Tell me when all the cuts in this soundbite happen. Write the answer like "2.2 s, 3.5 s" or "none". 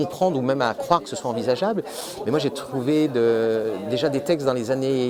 none